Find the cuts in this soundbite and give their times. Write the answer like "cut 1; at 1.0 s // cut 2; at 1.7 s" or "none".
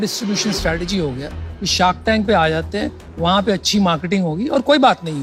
none